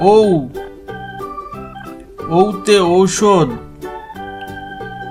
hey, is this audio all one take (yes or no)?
yes